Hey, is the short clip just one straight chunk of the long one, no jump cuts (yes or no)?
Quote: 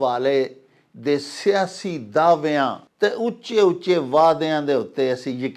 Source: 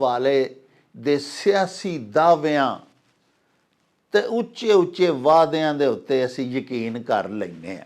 no